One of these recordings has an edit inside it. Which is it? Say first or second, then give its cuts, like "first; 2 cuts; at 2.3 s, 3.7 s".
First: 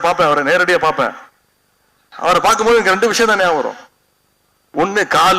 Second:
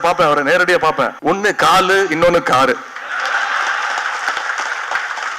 second; 1 cut; at 1.1 s